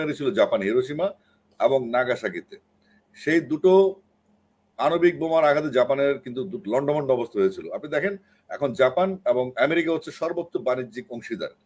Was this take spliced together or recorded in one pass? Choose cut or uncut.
uncut